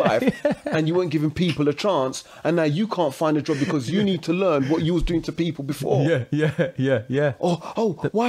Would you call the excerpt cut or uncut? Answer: uncut